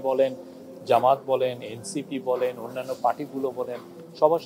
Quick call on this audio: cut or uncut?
uncut